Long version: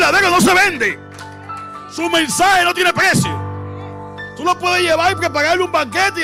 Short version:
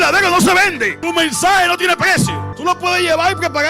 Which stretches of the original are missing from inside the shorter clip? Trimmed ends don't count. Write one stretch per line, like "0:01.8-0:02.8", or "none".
0:01.0-0:01.9
0:03.4-0:04.3